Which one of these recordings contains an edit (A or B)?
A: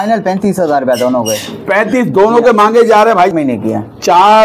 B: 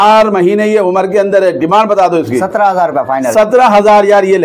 A